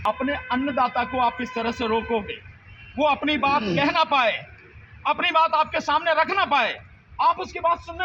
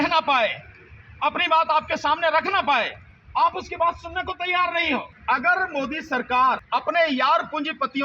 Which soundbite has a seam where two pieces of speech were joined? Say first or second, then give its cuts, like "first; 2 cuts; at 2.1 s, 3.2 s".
second; 2 cuts; at 5.1 s, 6.6 s